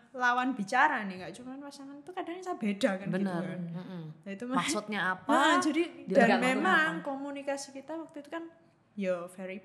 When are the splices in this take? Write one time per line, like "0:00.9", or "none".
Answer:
none